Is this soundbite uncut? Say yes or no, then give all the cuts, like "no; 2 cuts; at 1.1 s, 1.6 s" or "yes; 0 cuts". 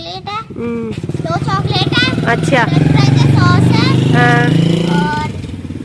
yes; 0 cuts